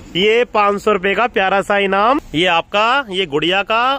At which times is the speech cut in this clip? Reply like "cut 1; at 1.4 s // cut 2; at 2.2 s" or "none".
cut 1; at 2.3 s